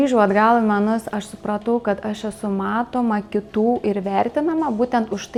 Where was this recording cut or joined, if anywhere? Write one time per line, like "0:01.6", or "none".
none